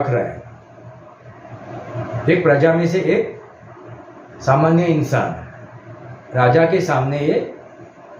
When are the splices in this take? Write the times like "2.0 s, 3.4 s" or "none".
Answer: none